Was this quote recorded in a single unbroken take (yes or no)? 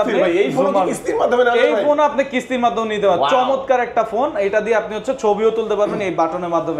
yes